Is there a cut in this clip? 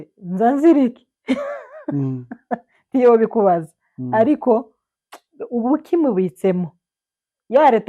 no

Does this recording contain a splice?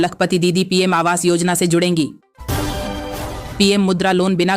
yes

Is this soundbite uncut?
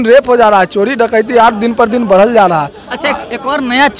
yes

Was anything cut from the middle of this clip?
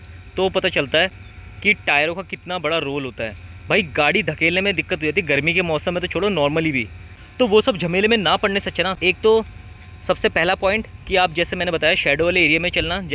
no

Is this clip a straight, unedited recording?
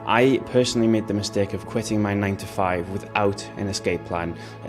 yes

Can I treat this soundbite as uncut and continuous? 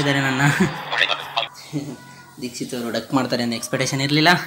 no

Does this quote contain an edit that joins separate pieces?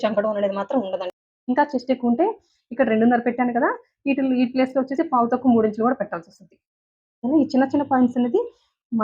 yes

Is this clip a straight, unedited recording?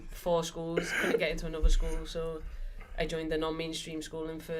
yes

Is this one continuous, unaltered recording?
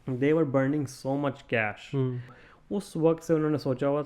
no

